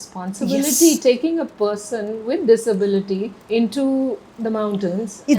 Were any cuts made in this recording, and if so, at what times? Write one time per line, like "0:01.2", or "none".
0:03.3
0:04.3